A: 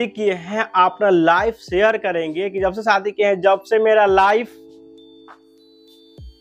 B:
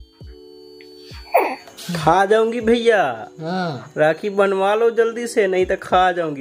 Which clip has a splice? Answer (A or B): B